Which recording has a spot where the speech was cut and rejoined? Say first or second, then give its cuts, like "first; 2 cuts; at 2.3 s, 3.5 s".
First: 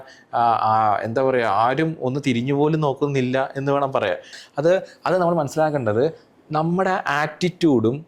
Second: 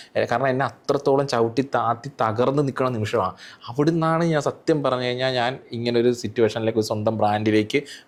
first; 1 cut; at 4.4 s